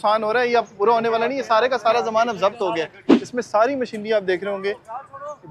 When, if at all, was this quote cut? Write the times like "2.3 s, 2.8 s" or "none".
3.2 s